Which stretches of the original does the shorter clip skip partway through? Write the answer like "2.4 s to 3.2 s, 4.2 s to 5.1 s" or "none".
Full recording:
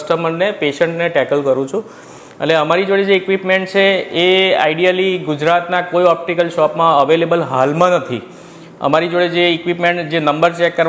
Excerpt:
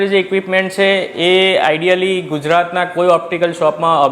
none